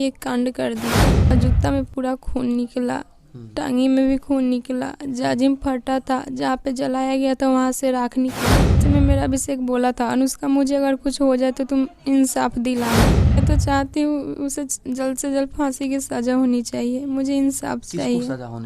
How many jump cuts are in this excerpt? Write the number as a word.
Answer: three